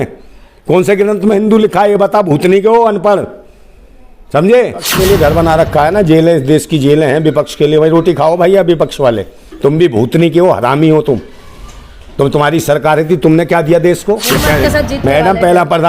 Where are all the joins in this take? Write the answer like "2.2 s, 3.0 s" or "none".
4.9 s, 14.3 s